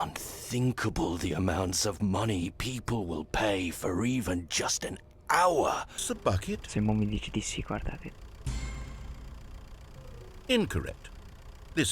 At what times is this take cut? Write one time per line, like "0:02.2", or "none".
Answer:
0:06.1